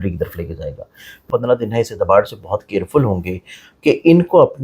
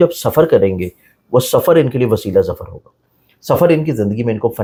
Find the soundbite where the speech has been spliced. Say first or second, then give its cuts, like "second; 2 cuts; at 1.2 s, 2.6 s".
first; 1 cut; at 1.2 s